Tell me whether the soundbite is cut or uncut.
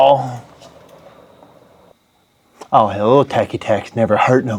cut